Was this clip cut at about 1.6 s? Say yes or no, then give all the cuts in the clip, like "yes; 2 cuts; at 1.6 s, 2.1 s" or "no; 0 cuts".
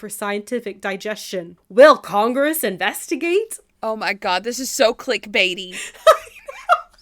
yes; 2 cuts; at 1.6 s, 3.6 s